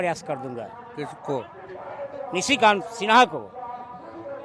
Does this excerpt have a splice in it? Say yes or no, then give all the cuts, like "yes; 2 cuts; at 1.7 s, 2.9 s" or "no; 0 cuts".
no; 0 cuts